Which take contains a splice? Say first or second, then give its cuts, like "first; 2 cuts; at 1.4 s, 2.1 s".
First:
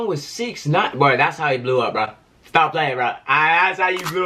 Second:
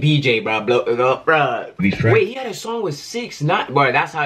second; 1 cut; at 1.8 s